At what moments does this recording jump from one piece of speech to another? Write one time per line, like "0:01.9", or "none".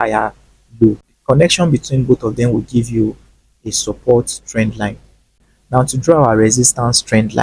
0:01.1
0:05.3